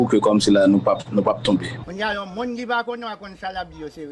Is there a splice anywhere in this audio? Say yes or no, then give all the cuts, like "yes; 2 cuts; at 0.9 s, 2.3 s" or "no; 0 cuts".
yes; 1 cut; at 1.8 s